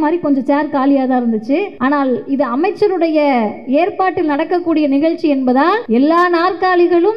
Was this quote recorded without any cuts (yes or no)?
no